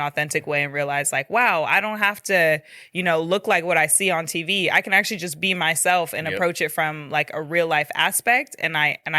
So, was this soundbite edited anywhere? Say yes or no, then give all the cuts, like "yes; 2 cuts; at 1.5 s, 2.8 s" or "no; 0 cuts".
no; 0 cuts